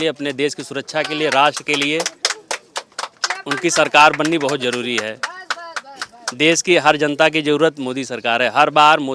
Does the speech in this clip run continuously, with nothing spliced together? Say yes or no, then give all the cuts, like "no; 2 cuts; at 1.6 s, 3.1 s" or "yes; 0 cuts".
yes; 0 cuts